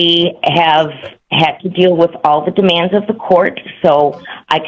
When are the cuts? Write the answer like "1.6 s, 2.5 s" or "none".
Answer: none